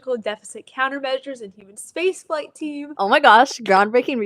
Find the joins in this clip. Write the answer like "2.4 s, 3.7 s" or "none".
2.8 s